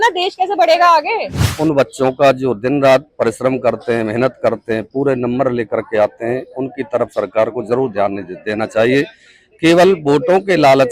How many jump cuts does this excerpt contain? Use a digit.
1